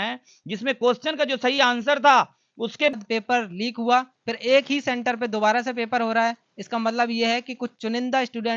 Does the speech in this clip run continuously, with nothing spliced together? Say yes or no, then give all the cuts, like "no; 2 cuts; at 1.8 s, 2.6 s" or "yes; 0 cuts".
no; 1 cut; at 2.9 s